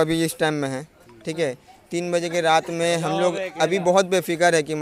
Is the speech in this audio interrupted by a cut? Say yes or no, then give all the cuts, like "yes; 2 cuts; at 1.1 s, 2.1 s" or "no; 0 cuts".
no; 0 cuts